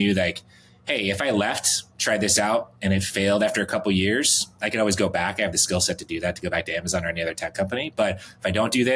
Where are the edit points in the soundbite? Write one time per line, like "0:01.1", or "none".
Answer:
none

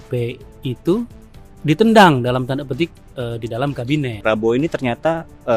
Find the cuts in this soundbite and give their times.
0:04.2

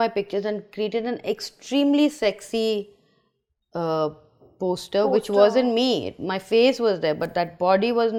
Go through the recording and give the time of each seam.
none

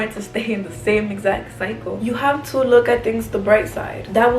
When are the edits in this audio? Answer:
0:01.9

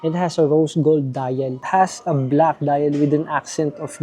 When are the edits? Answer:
0:01.6

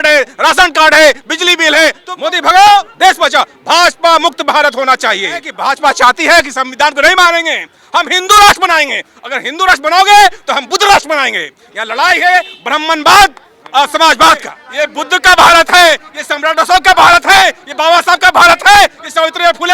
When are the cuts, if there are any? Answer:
0:02.1
0:05.5
0:14.6

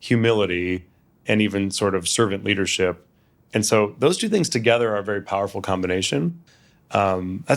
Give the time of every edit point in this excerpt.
0:06.4

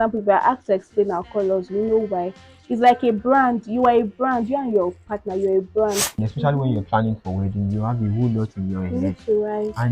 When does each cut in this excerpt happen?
0:06.2

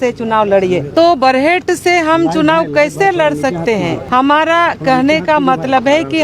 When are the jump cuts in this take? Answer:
0:00.9
0:04.0

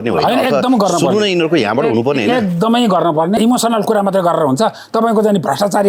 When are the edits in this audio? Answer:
0:03.4

